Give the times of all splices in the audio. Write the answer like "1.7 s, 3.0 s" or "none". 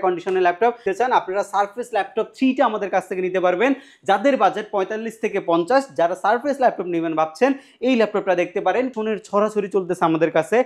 0.8 s, 8.9 s